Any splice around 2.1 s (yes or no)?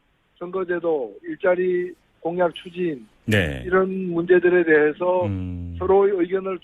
no